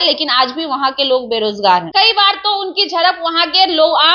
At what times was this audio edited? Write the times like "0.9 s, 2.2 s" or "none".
1.9 s